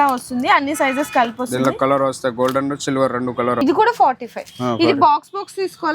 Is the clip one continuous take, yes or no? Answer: no